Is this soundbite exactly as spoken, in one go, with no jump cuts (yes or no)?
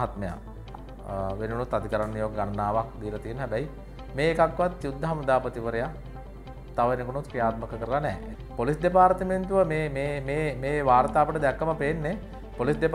no